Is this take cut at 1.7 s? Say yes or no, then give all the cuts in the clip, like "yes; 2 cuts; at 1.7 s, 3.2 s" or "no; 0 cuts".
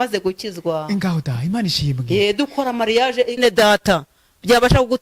no; 1 cut; at 3.4 s